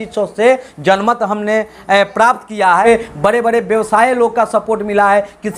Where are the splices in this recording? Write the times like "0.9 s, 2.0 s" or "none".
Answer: 2.8 s